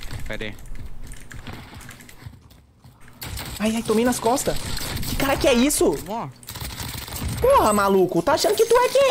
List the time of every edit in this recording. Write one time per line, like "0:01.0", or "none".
none

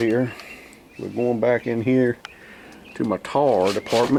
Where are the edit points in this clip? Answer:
none

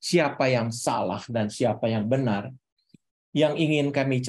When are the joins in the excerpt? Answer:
none

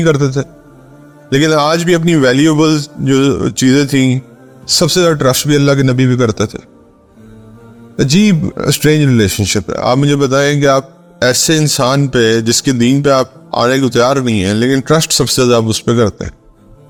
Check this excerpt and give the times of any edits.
none

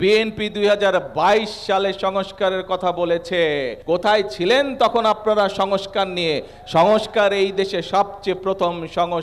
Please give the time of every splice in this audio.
0:03.7

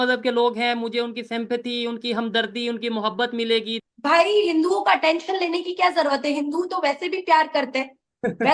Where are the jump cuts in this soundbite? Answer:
0:03.8

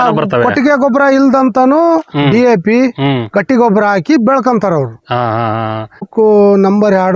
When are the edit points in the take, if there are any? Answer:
0:06.1

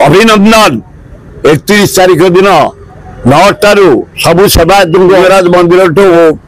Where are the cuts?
0:05.2

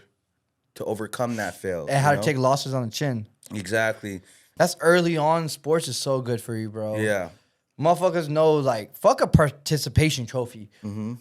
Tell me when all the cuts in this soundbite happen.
0:04.4

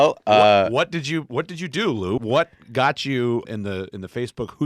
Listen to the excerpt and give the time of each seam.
0:02.2
0:03.4

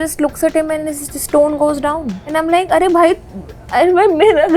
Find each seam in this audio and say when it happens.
0:02.1

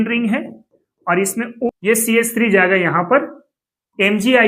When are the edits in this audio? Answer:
0:01.7

